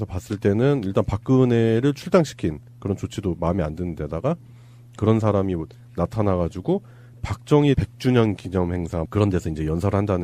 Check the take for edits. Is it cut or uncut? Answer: cut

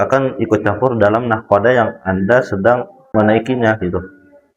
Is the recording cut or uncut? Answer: cut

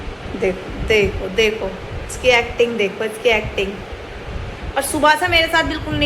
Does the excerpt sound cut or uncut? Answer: uncut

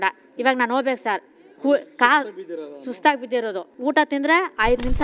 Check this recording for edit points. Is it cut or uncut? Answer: cut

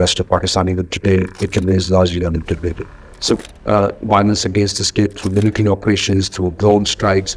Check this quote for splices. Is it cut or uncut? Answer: cut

